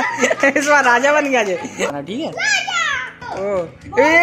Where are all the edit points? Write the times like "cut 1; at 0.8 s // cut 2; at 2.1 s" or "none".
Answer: cut 1; at 1.9 s // cut 2; at 3.2 s